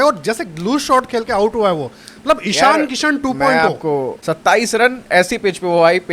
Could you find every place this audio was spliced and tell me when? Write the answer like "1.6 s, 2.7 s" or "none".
4.2 s